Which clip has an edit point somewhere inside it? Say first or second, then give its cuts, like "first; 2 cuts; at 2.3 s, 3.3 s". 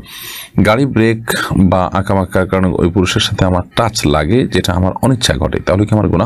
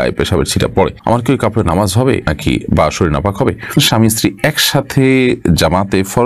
second; 3 cuts; at 1.0 s, 2.3 s, 3.8 s